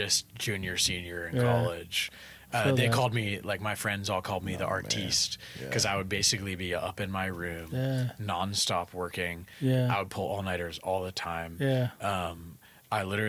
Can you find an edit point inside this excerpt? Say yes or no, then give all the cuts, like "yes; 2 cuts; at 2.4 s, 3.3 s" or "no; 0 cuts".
no; 0 cuts